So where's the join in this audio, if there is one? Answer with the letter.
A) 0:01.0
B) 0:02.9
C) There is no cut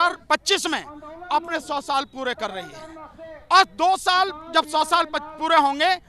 C